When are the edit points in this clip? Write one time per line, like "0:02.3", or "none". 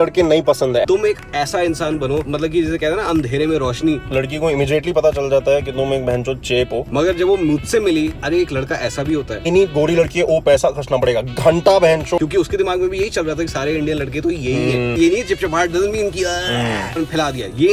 0:00.8
0:02.3
0:04.0
0:06.9
0:08.2
0:09.4
0:12.2
0:15.0
0:17.0